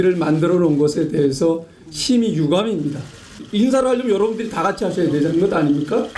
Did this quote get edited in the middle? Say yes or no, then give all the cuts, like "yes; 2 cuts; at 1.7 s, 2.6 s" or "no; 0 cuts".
yes; 1 cut; at 3.4 s